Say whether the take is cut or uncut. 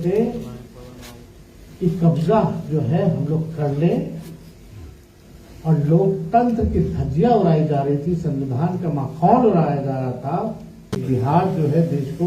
cut